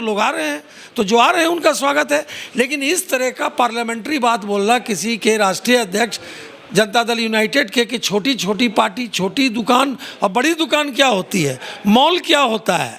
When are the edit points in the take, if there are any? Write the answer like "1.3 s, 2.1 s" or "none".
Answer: none